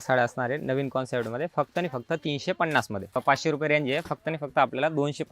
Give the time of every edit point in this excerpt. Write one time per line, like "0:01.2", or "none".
0:03.2